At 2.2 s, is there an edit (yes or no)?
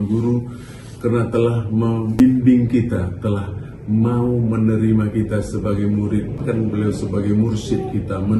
yes